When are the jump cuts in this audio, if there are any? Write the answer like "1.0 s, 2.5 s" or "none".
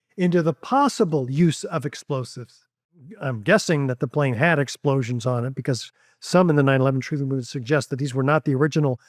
3.1 s